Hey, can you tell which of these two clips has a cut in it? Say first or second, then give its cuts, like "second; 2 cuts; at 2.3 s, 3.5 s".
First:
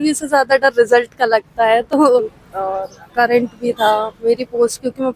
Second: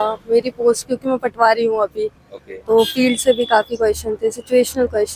first; 1 cut; at 2.4 s